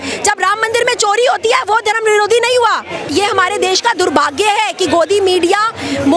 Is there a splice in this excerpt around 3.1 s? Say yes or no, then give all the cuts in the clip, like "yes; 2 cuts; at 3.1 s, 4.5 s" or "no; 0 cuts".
yes; 1 cut; at 3.1 s